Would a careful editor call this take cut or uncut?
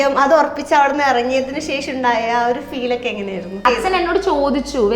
cut